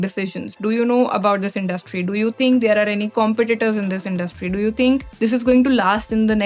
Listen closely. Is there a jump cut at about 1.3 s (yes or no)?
no